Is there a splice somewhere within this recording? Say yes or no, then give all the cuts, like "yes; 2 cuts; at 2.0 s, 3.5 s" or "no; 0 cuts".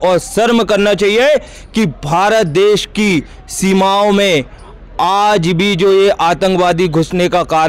no; 0 cuts